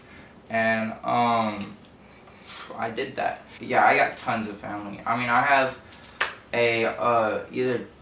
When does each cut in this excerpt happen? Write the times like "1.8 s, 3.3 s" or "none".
3.5 s